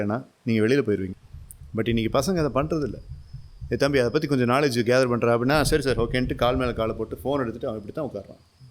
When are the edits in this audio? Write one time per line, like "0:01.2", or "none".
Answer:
0:01.1